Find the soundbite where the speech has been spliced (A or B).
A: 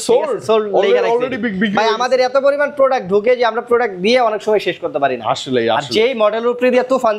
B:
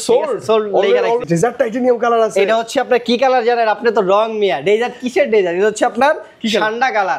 B